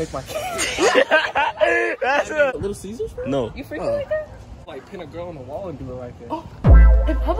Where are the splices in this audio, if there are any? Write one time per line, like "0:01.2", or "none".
0:02.5
0:04.5